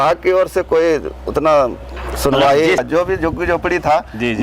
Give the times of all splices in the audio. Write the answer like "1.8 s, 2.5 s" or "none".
2.8 s